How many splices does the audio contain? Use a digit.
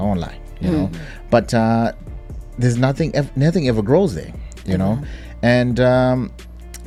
0